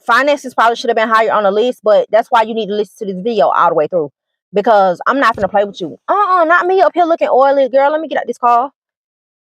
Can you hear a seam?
no; 0 cuts

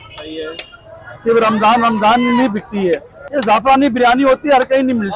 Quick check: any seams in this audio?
yes; 1 cut; at 3.2 s

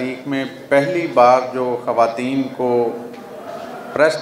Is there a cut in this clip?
no; 0 cuts

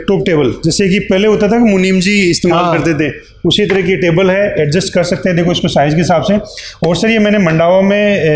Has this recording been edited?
no; 0 cuts

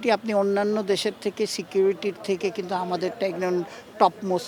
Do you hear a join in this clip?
no; 0 cuts

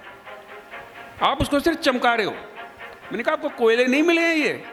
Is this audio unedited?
yes; 0 cuts

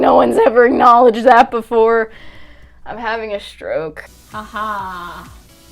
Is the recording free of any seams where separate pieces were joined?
no; 1 cut; at 4.2 s

